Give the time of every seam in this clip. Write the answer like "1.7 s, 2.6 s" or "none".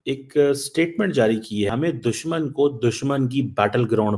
1.7 s